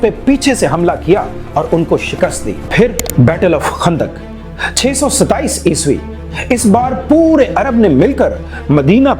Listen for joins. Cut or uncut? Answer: cut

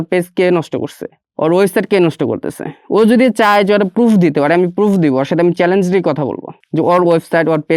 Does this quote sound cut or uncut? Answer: uncut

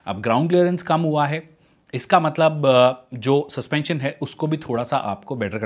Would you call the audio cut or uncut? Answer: uncut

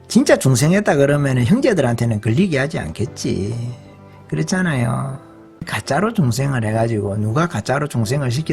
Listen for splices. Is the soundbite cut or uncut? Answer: cut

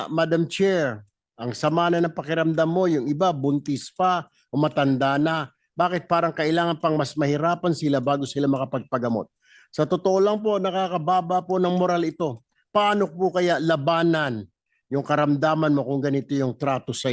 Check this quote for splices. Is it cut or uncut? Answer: uncut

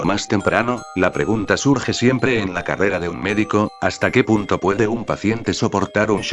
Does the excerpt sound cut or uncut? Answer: cut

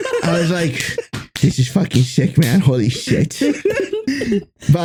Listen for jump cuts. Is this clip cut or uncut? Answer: uncut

